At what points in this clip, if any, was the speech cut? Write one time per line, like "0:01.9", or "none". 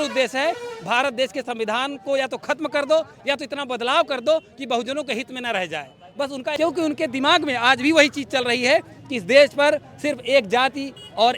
0:06.5